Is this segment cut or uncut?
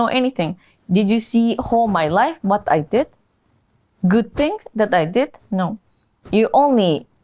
uncut